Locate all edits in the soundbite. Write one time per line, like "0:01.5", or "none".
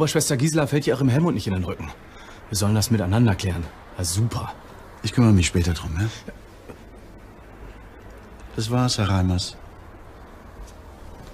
0:03.6